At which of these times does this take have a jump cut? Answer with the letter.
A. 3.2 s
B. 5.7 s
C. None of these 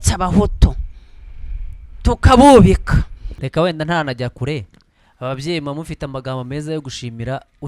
A